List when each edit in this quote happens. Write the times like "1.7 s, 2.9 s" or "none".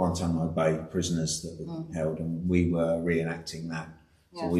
none